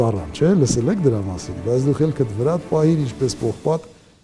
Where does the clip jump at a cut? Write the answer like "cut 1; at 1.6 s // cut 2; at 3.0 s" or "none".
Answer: none